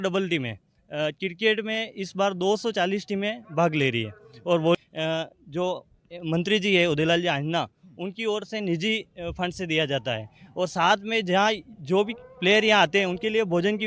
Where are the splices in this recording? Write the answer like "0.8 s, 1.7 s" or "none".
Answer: 4.8 s